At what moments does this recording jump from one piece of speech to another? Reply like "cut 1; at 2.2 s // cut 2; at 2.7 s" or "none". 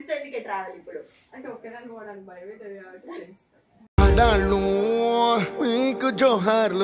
none